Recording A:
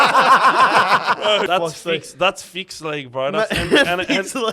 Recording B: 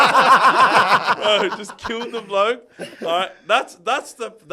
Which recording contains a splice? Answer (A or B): A